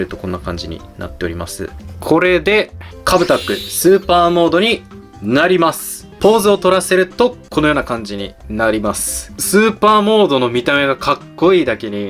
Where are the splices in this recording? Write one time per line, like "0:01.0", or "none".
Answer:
0:01.8
0:06.1
0:09.3